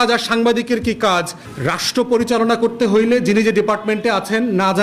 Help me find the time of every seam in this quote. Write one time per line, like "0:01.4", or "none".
0:01.4